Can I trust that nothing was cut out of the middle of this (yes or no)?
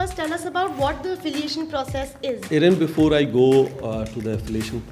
no